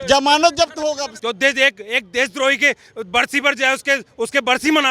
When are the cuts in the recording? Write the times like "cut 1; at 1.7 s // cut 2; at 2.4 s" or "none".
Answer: cut 1; at 1.1 s